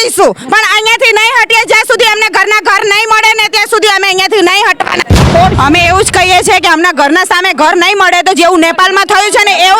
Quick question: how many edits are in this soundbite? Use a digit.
1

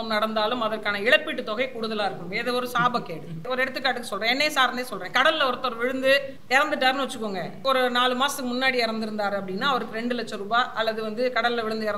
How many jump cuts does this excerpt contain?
3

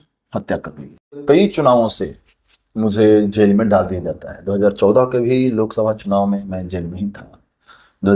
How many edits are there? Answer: 1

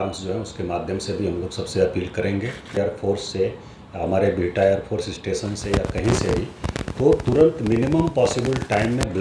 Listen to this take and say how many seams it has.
1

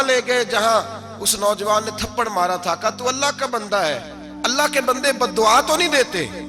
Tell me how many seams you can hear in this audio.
0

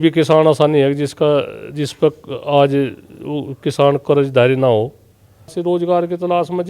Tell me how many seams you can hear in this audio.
1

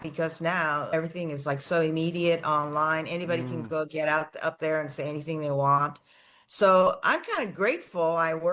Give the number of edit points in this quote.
1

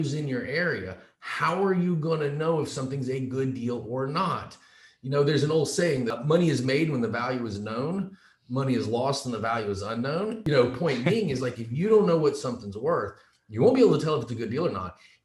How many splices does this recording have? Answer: 2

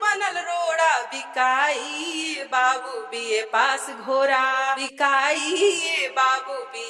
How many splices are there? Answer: 1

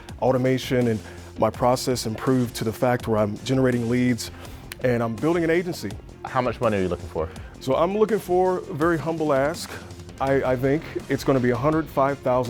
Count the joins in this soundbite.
1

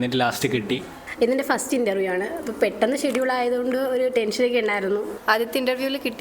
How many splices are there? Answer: 2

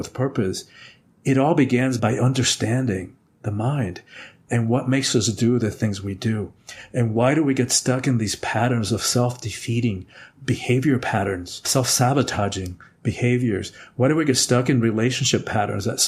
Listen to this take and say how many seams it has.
0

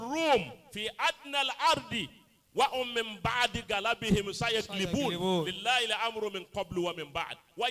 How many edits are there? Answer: 0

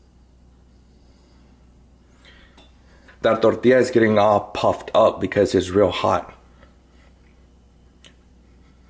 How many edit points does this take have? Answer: 1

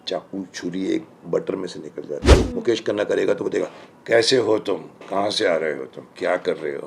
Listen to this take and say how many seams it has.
1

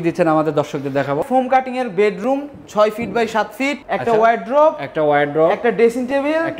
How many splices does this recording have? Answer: 2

